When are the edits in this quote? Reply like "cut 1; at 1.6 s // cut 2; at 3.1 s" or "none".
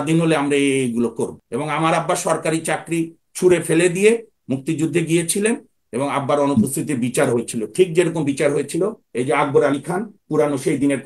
cut 1; at 1.4 s